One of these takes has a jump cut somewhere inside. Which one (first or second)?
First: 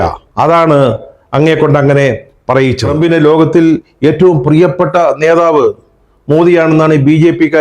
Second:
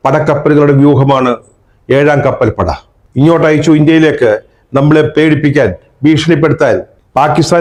first